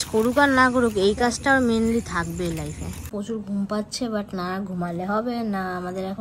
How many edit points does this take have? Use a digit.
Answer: 1